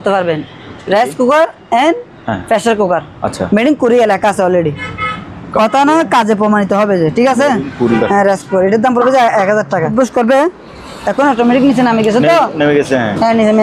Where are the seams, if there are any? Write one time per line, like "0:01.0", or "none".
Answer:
0:08.0
0:09.9